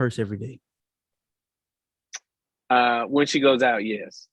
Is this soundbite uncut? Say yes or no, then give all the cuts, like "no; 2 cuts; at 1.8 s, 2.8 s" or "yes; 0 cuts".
yes; 0 cuts